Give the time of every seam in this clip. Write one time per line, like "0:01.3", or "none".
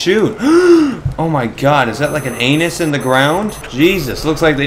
none